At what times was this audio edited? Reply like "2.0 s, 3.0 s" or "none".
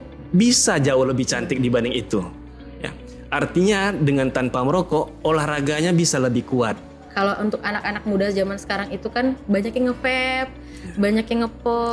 6.9 s